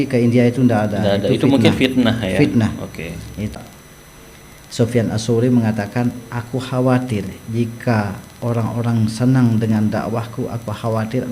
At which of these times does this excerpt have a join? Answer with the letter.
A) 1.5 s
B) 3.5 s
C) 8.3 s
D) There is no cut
B